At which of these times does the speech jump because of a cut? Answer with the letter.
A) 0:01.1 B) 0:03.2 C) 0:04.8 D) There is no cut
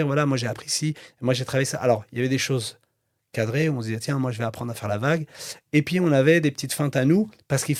D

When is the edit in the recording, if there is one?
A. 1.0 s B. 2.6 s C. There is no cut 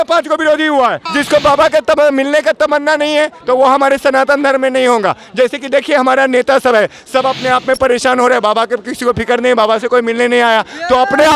A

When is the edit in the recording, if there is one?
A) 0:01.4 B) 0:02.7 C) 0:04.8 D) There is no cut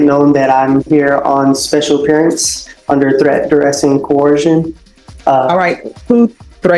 D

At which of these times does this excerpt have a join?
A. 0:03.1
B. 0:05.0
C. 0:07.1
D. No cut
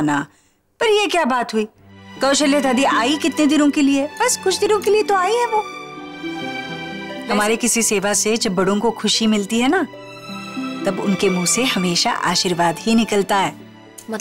C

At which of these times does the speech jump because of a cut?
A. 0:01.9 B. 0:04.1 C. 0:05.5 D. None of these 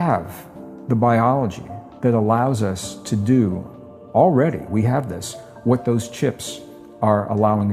D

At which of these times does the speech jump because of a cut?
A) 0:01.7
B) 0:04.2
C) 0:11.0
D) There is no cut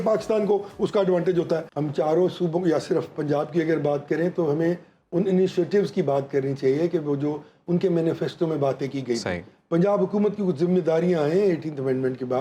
A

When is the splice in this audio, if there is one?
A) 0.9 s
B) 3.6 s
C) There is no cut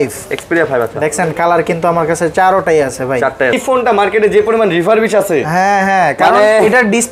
B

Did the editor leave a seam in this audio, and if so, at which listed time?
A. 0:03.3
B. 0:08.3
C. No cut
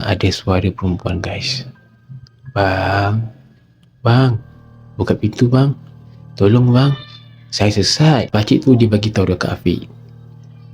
B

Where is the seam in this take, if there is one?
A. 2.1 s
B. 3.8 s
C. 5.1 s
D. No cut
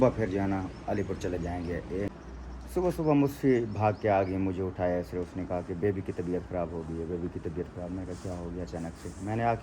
A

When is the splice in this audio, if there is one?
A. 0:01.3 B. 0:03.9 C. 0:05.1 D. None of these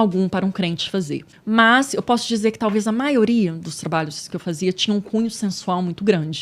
A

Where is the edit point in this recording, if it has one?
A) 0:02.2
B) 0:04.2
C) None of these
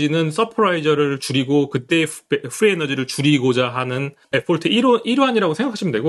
B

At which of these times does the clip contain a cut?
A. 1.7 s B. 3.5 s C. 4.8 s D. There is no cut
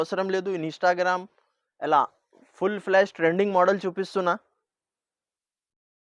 D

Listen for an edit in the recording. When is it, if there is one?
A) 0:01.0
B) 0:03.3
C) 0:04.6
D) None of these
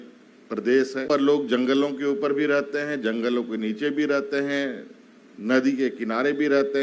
A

